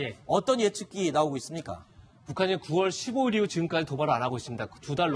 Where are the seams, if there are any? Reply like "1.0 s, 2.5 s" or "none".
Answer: 4.2 s